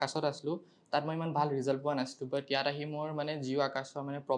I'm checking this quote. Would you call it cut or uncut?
uncut